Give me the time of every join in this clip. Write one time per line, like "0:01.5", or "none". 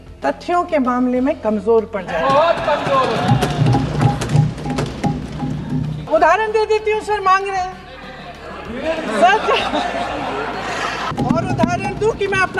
0:06.0
0:11.1